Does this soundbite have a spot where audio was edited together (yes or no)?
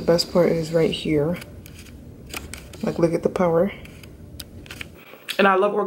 yes